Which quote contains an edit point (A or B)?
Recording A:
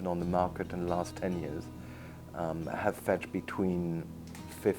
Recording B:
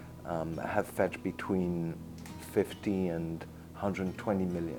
A